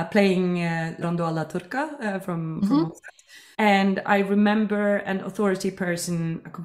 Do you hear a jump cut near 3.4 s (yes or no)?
yes